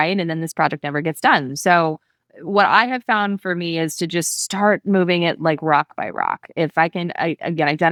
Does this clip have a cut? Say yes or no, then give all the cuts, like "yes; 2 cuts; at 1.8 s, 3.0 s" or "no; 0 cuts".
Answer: no; 0 cuts